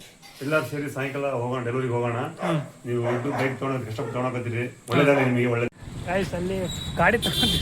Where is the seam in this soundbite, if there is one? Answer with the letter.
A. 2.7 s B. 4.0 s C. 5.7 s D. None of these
C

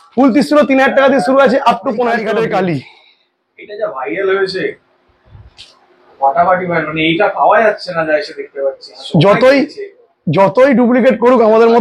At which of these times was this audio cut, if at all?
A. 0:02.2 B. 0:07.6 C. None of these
A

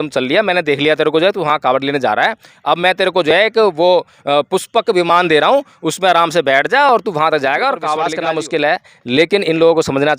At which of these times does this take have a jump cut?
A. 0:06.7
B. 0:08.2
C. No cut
B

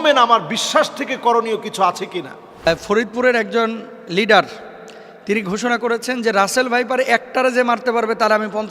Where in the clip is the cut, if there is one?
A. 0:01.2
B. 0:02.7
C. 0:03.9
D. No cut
B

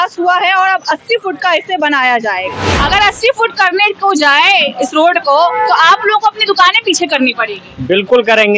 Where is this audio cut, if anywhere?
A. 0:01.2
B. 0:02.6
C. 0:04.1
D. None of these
B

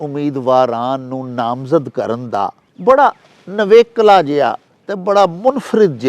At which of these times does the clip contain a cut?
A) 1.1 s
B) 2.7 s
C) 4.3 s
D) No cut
B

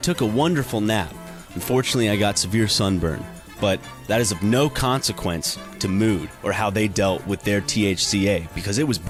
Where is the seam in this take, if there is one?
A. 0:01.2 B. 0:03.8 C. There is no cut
C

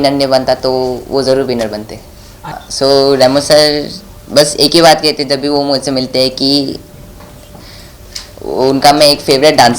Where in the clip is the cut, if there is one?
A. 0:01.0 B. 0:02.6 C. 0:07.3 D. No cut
B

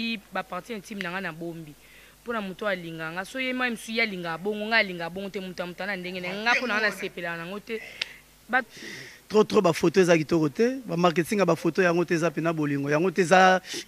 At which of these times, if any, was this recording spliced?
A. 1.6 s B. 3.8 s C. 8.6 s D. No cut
C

